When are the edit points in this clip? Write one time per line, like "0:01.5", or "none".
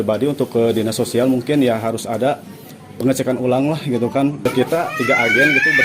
0:04.5